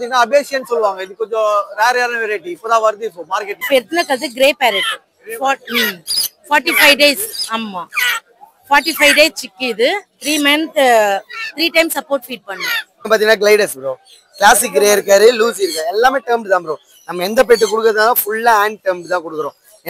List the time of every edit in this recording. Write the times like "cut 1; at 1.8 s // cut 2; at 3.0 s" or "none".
cut 1; at 3.5 s // cut 2; at 13.1 s